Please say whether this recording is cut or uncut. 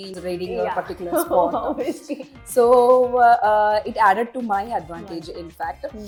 uncut